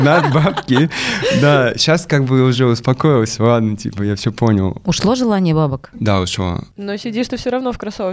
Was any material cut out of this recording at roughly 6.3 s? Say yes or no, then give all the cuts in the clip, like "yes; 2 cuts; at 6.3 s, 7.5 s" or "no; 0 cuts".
yes; 1 cut; at 6.3 s